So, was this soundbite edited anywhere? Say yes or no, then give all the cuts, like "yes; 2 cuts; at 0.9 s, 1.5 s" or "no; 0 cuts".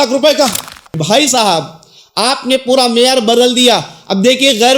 yes; 1 cut; at 1.0 s